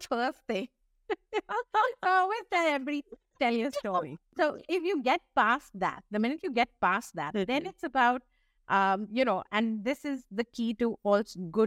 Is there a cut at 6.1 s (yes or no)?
no